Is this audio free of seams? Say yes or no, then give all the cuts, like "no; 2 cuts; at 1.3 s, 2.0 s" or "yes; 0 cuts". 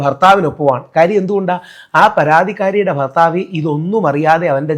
yes; 0 cuts